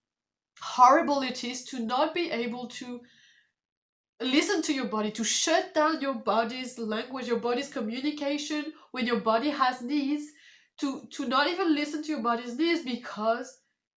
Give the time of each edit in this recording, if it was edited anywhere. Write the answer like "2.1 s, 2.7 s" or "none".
none